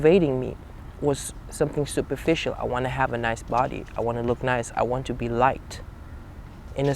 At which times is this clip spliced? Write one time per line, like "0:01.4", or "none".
none

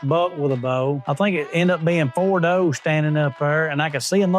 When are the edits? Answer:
0:01.0

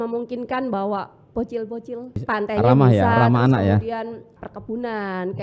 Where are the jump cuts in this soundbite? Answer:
0:02.2
0:04.3

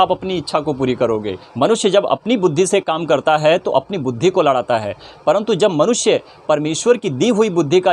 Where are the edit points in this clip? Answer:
0:01.4

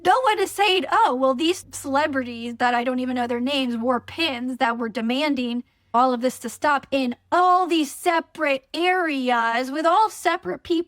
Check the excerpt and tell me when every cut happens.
0:01.7
0:05.9

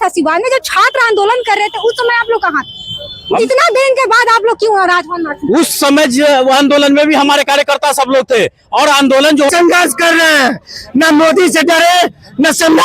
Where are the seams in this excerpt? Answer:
0:09.5

